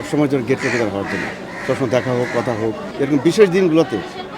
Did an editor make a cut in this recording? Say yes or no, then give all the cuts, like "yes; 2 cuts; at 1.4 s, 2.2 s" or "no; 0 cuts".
yes; 1 cut; at 2.9 s